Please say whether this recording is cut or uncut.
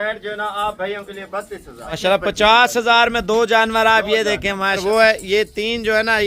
cut